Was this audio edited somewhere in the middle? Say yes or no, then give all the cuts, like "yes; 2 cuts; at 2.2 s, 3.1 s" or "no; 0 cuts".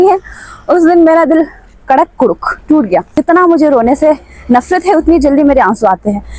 no; 0 cuts